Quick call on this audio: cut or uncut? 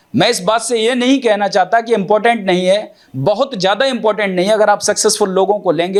uncut